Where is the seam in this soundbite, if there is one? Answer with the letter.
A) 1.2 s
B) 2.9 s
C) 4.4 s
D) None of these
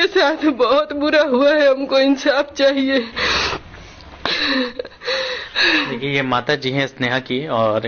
D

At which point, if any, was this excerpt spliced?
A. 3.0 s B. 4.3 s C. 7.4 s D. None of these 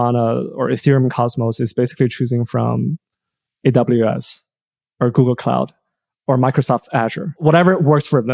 C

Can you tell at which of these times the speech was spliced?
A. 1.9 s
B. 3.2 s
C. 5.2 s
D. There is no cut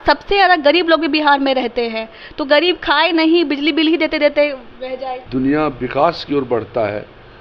C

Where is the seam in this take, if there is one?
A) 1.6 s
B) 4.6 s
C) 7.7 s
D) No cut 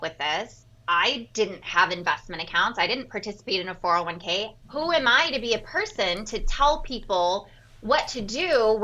B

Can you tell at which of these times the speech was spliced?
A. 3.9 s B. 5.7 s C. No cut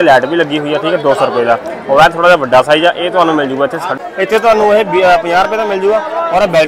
A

